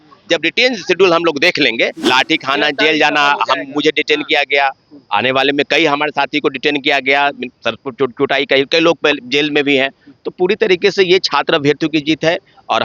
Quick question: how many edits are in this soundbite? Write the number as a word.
one